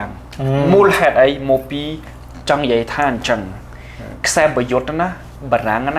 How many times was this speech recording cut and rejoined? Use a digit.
0